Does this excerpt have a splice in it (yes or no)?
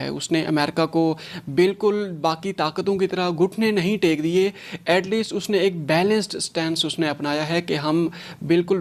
no